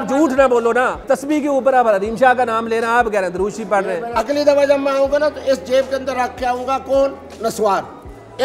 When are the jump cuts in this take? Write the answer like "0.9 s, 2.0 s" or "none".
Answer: 1.0 s, 4.0 s